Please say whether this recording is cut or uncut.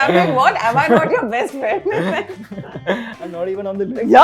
uncut